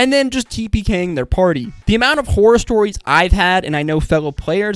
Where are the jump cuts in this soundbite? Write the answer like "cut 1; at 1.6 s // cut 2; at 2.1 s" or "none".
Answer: cut 1; at 1.7 s